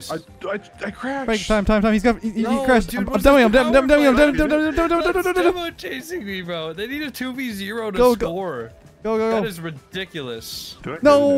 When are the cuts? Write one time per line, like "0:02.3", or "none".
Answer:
none